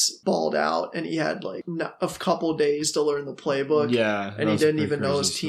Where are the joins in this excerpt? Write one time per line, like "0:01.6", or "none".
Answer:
0:01.6